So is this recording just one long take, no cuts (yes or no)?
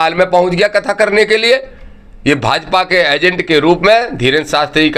yes